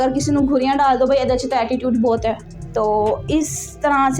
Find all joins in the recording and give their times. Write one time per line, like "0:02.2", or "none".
0:02.5